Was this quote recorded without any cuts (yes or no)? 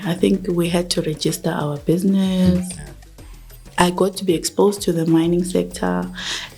no